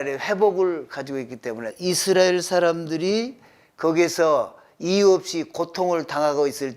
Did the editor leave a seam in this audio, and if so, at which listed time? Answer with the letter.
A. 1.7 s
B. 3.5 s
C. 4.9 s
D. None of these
A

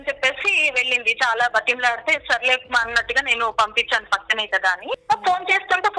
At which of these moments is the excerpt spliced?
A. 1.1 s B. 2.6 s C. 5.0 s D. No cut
C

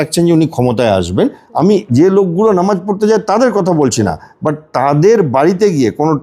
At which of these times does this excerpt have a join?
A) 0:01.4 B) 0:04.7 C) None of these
A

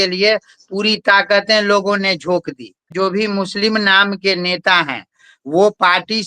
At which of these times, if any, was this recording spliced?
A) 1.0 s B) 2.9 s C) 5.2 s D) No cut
B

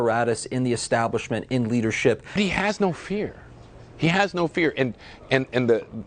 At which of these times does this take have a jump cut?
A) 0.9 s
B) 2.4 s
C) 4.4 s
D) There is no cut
B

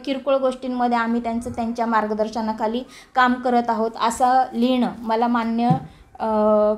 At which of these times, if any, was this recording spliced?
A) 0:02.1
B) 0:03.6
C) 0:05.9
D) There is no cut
D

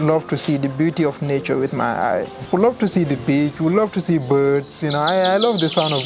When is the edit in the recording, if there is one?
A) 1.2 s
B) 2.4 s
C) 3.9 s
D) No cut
B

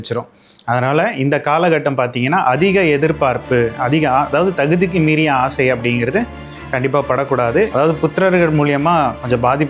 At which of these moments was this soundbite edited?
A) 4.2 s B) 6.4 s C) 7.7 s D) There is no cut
C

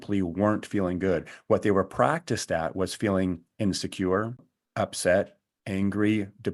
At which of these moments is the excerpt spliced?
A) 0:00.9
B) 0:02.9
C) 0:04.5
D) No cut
C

